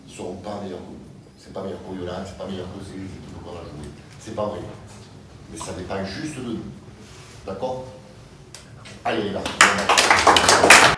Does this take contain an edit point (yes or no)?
no